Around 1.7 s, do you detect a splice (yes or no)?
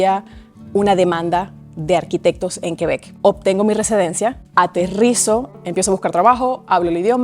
no